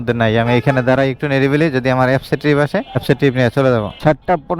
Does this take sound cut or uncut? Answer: uncut